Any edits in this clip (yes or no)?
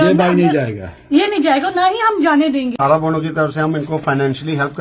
yes